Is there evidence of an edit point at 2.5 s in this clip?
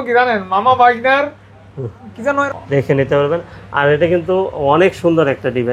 yes; 1 cut; at 2.5 s

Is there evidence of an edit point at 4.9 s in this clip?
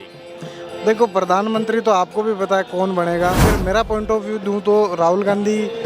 no; 1 cut; at 3.4 s

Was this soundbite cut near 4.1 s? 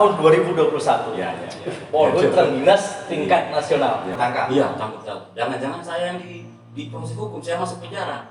yes; 1 cut; at 4.1 s

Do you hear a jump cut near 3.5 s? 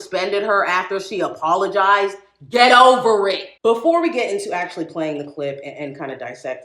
yes; 1 cut; at 3.5 s

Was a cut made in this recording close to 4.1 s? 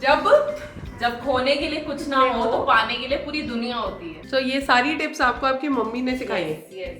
yes; 1 cut; at 4.1 s

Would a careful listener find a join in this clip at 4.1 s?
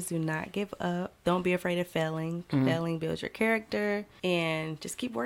yes; 2 cuts; at 1.2 s, 4.1 s

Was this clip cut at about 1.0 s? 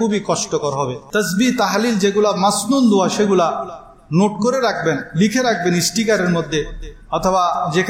yes; 1 cut; at 1.0 s

